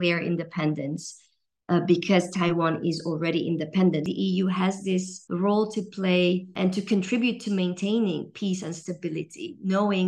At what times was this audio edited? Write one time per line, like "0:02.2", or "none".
0:04.1
0:05.2
0:06.5